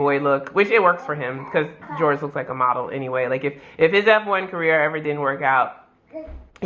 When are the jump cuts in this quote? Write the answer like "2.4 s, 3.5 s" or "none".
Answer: none